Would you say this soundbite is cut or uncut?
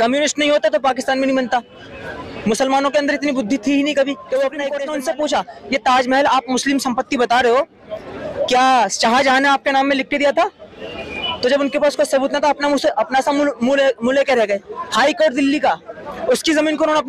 cut